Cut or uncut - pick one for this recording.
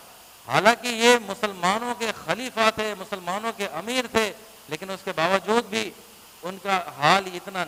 uncut